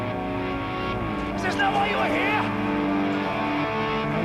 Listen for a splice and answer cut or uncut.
uncut